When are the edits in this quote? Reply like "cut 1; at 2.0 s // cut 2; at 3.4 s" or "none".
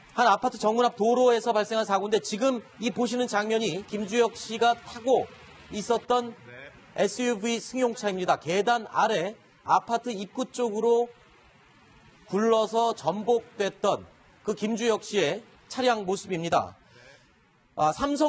cut 1; at 10.2 s